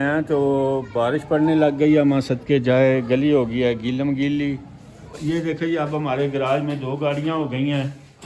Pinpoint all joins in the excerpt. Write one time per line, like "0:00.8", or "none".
0:05.2